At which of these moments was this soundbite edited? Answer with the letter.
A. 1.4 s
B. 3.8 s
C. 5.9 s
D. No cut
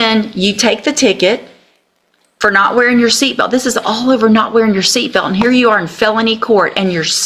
D